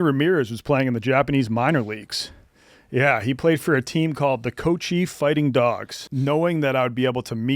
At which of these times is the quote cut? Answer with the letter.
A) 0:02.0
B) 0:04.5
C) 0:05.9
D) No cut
C